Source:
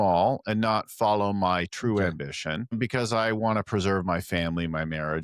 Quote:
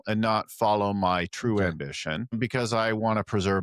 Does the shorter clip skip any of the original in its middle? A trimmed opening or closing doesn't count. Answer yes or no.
no